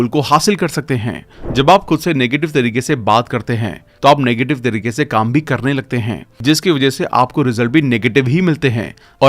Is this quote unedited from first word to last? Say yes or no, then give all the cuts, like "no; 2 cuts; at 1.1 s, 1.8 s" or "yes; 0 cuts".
no; 1 cut; at 1.3 s